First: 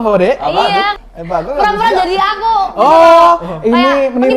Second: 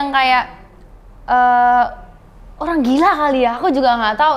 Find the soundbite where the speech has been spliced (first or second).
first